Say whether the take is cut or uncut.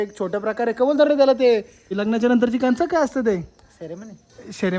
cut